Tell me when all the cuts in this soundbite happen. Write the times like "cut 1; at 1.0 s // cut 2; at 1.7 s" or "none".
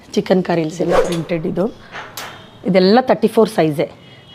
cut 1; at 1.0 s